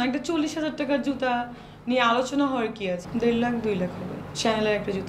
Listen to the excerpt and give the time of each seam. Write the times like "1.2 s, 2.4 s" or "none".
3.0 s